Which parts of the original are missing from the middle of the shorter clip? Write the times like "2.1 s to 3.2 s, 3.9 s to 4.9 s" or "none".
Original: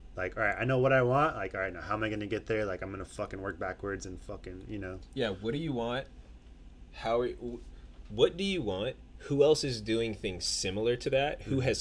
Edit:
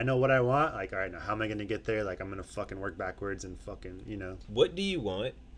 5.0 s to 8.0 s